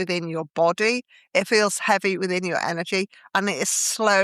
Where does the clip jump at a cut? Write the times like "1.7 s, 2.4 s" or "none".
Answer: none